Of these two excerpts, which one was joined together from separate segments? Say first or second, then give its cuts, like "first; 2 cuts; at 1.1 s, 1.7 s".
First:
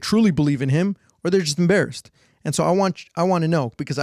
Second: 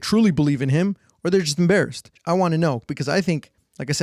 second; 1 cut; at 2.1 s